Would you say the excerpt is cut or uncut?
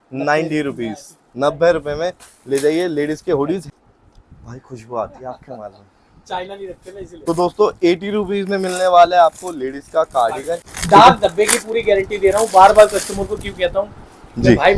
cut